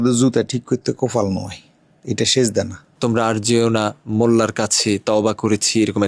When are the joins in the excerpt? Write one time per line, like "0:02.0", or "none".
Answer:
0:02.8